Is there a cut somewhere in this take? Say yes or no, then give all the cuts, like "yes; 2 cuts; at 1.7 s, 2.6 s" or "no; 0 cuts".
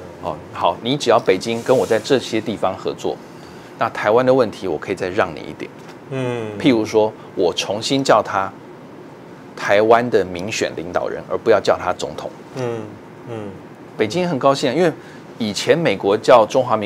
no; 0 cuts